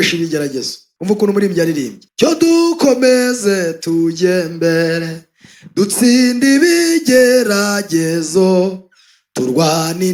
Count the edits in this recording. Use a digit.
0